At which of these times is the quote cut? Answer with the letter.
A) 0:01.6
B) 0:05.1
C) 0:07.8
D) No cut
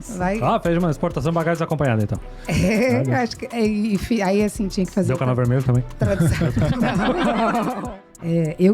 C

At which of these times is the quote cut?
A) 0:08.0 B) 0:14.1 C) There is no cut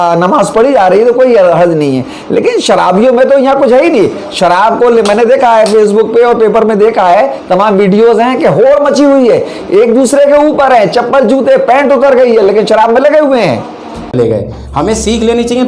B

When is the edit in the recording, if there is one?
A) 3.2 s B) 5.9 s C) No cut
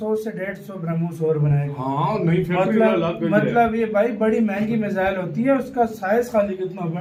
C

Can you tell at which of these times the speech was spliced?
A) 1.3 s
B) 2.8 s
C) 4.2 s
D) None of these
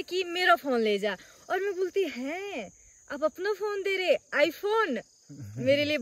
D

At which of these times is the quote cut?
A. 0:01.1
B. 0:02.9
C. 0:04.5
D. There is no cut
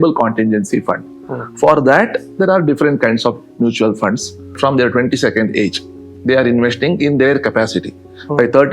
C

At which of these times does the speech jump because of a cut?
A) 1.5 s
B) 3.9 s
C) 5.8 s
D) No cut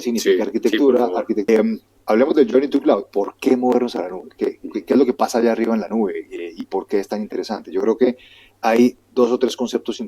A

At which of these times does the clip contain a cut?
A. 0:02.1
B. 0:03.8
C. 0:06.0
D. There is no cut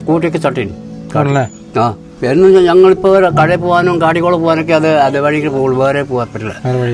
A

